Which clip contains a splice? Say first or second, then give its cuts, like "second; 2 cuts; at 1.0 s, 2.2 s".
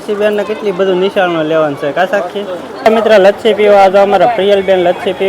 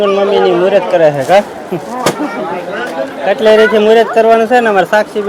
first; 1 cut; at 2.9 s